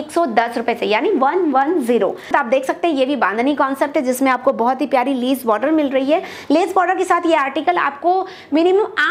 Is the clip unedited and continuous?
no; 1 cut; at 2.3 s

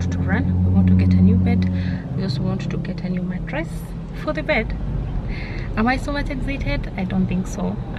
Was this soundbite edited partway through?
no; 0 cuts

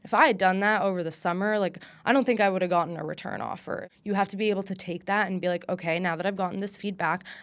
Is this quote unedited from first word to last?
no; 1 cut; at 3.8 s

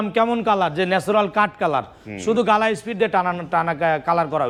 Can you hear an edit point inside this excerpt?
no; 0 cuts

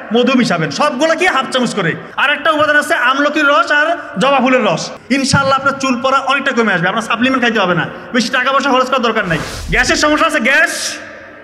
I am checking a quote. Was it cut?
yes; 3 cuts; at 2.1 s, 4.9 s, 9.6 s

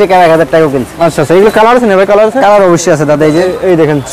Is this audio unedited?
yes; 0 cuts

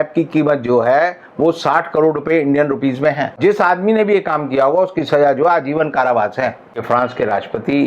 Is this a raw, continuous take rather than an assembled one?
no; 2 cuts; at 3.4 s, 6.8 s

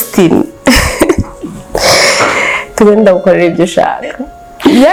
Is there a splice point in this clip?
no; 0 cuts

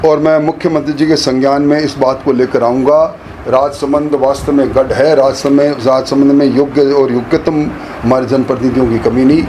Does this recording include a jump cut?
no; 0 cuts

